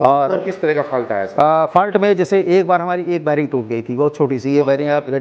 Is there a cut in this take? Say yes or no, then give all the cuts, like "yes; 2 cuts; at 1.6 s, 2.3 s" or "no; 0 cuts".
no; 0 cuts